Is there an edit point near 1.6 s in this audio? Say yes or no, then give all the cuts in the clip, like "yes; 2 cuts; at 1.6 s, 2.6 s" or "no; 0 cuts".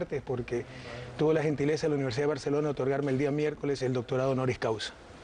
yes; 1 cut; at 1.6 s